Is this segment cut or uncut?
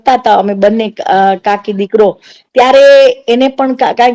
uncut